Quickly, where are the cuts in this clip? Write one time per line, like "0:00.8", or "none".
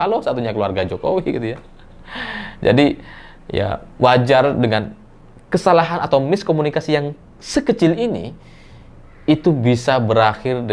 none